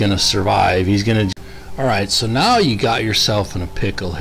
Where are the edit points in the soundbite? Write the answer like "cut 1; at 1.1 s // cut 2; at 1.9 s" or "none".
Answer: cut 1; at 1.3 s